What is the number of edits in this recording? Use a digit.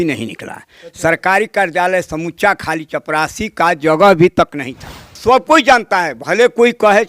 1